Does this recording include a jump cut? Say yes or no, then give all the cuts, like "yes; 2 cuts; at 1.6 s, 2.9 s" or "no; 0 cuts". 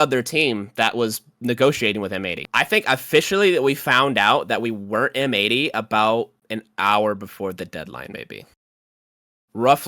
yes; 1 cut; at 2.5 s